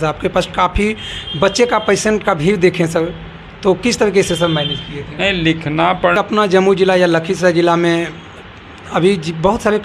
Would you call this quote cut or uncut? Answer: cut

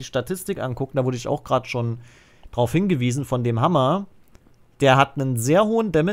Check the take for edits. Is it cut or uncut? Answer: uncut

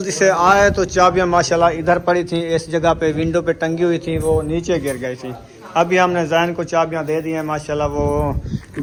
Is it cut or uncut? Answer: uncut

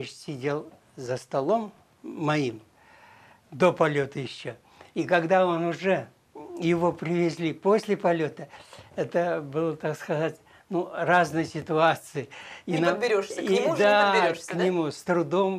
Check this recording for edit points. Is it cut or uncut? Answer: uncut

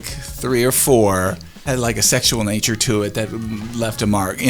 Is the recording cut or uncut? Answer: cut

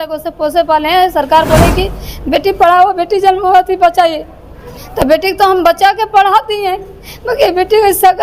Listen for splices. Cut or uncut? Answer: uncut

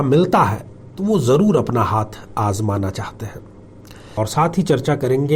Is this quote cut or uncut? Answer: cut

